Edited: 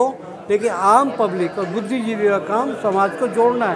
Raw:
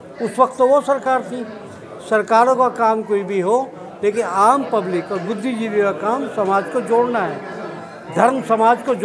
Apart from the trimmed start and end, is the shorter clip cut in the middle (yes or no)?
no